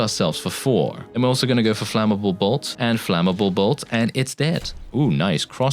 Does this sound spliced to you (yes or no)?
yes